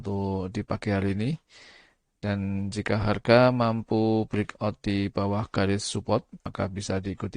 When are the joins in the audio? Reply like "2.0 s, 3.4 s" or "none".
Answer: 6.5 s